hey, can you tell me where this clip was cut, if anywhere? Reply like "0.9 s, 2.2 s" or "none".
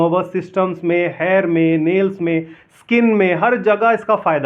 none